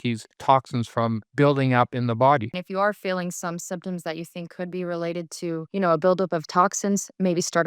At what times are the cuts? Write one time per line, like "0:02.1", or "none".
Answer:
0:02.5